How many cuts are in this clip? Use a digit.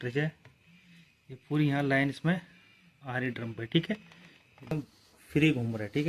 1